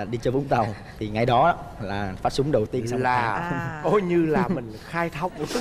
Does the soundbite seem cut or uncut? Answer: uncut